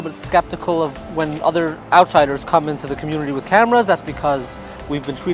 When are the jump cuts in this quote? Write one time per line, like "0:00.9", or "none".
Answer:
0:01.0